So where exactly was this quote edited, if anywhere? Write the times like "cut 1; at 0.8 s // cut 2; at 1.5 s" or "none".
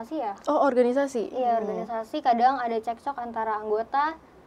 none